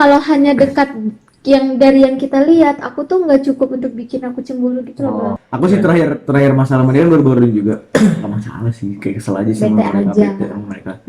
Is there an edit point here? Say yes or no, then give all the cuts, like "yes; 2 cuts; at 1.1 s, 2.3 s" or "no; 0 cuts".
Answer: yes; 1 cut; at 5.4 s